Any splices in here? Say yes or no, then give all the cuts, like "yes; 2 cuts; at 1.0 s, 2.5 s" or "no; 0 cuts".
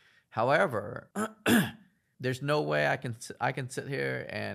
no; 0 cuts